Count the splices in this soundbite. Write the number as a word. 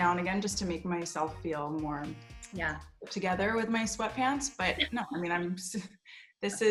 zero